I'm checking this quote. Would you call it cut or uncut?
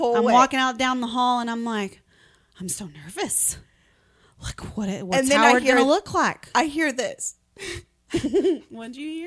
uncut